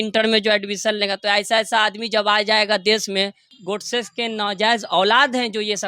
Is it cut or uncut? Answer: cut